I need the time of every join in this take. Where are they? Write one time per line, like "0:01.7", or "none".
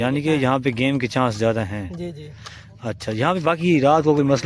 none

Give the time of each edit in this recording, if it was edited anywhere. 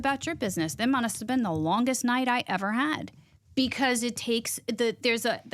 none

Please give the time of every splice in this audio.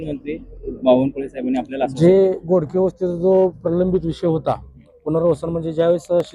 none

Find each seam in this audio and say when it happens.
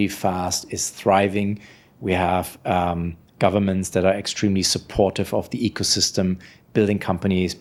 none

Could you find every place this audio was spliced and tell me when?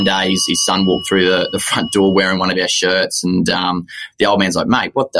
none

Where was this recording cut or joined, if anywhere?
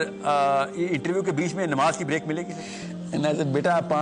0:02.9

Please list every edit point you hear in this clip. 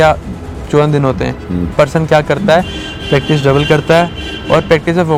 none

